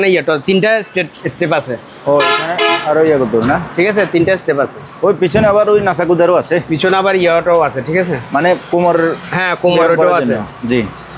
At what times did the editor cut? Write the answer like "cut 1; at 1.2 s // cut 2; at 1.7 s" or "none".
none